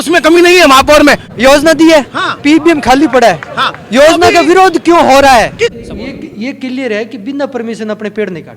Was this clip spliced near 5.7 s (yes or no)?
yes